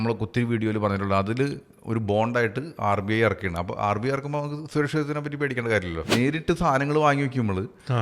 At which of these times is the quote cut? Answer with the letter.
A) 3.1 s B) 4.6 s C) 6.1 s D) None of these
C